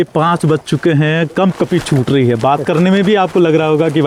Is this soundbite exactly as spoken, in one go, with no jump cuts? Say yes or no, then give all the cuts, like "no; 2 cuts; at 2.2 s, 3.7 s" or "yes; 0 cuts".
yes; 0 cuts